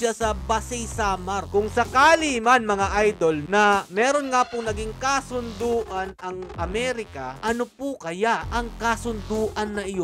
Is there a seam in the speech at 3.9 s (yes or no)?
no